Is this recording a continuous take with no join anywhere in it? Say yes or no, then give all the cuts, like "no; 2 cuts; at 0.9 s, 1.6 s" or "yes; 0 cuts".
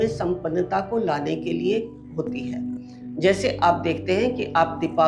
yes; 0 cuts